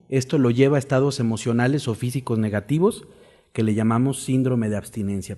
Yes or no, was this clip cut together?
yes